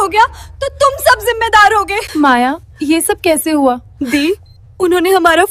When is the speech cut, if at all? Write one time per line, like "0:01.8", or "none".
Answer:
0:02.0
0:02.7
0:03.9